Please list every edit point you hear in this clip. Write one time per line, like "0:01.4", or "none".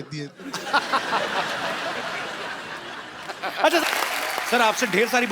0:03.8